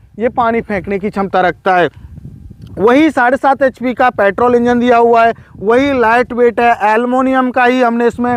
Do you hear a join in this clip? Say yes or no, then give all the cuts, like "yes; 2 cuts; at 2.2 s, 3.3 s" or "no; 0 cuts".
no; 0 cuts